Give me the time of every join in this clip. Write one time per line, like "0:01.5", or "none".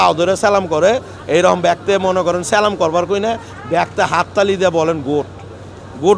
none